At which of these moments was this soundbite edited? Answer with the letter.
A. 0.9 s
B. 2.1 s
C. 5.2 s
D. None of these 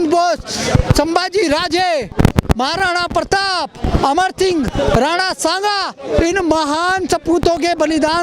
B